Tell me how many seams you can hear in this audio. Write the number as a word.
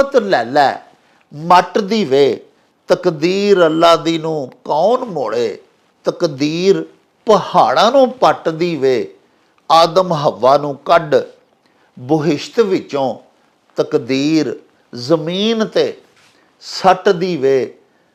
zero